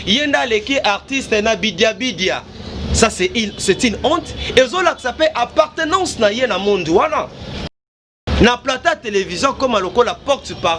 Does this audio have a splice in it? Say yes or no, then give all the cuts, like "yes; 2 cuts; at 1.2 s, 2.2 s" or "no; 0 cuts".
yes; 1 cut; at 7.8 s